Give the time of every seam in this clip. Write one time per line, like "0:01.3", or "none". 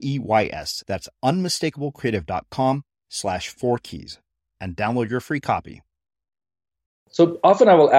0:07.1